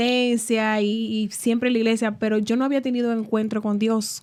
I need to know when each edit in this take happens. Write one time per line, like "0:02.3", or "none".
none